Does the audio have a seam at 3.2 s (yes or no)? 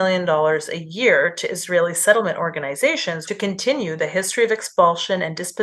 yes